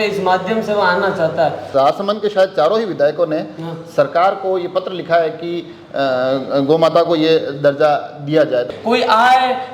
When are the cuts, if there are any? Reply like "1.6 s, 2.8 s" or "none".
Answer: 1.7 s, 8.7 s